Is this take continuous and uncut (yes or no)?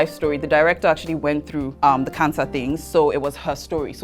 no